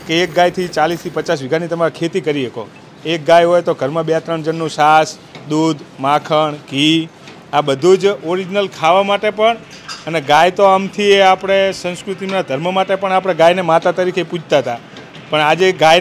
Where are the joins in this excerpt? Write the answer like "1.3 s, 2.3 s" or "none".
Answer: none